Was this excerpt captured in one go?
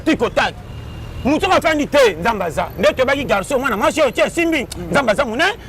yes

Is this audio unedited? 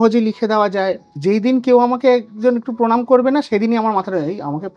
no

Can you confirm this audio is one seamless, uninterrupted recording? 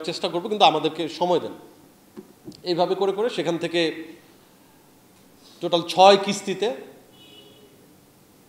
yes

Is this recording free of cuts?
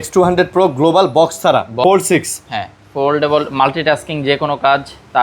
no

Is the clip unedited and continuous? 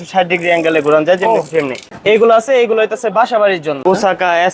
no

